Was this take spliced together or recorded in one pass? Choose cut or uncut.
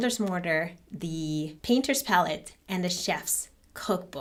uncut